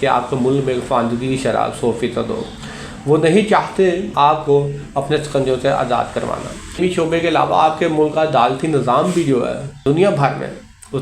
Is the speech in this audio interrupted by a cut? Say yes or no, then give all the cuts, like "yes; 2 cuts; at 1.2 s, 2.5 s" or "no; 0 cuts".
yes; 1 cut; at 6.8 s